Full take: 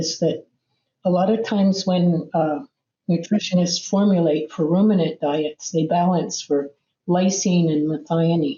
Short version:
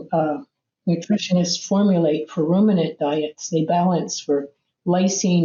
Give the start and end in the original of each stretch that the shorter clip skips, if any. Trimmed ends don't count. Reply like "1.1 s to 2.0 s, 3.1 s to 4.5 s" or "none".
none